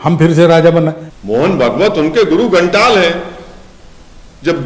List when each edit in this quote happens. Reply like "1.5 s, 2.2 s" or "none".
1.1 s